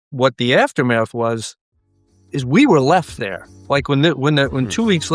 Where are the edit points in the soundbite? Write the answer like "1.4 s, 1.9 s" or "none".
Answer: none